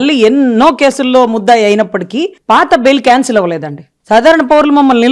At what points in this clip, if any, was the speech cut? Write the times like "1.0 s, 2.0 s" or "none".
3.9 s